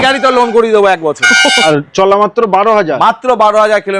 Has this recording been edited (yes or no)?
yes